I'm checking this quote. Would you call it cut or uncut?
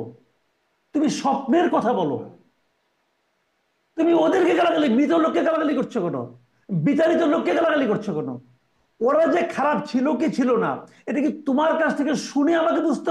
uncut